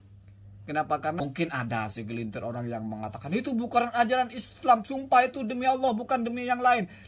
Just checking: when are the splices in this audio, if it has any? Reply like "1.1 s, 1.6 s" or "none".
1.2 s

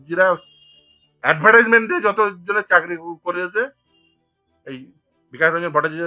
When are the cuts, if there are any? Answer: none

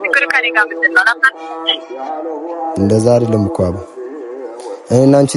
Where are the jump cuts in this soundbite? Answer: none

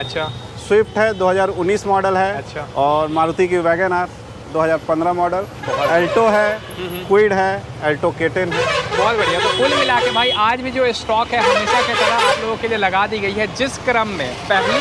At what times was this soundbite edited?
none

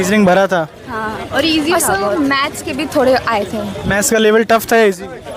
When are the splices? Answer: none

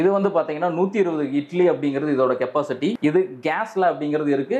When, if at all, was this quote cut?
3.0 s

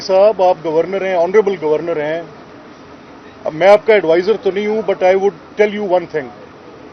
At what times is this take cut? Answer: none

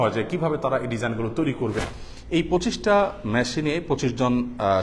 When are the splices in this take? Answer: 1.8 s

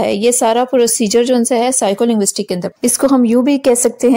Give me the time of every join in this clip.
2.7 s

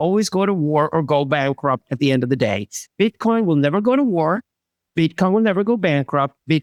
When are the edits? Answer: none

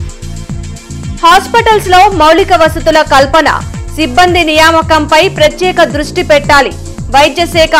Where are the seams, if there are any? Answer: 0.9 s

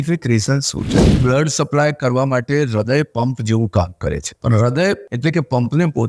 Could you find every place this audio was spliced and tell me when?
0.9 s, 4.4 s, 5.1 s

